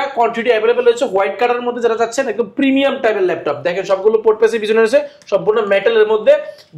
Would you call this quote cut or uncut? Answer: uncut